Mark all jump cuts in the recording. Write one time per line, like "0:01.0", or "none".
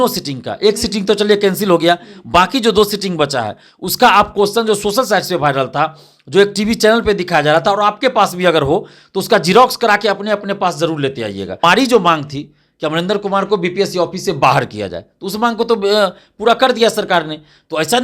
0:11.6